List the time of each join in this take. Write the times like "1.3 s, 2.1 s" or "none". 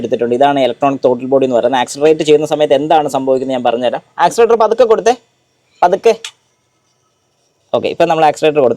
none